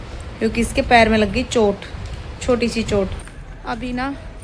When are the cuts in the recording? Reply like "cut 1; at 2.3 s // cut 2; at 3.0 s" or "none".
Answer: cut 1; at 3.1 s